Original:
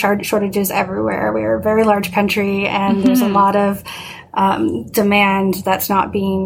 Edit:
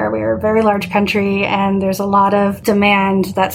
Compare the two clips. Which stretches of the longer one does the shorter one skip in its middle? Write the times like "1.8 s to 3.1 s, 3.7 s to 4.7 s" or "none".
3.8 s to 4.9 s